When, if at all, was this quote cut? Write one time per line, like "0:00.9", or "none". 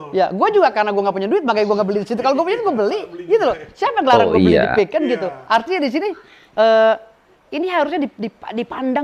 none